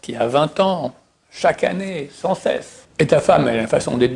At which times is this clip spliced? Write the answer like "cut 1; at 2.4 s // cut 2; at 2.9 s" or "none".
cut 1; at 2.8 s